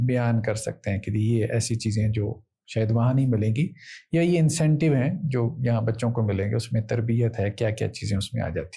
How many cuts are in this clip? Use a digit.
0